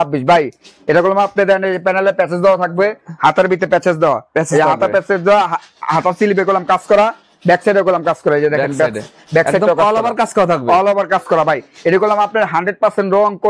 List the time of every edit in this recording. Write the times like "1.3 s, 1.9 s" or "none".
none